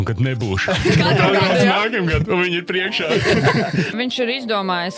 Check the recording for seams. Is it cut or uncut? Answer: cut